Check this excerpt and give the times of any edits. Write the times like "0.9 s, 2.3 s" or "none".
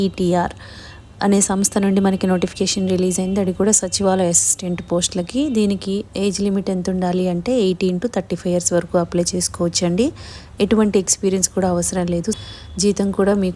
12.5 s